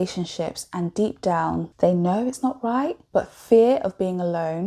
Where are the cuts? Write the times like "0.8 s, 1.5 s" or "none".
1.7 s, 3.0 s